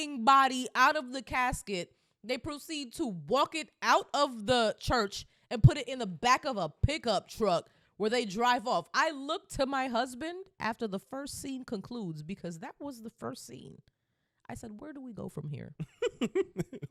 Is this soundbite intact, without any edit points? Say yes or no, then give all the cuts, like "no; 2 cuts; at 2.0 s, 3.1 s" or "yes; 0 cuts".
yes; 0 cuts